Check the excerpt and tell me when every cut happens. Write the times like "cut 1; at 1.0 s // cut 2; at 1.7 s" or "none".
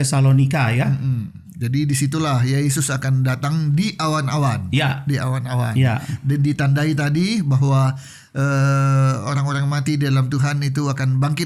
none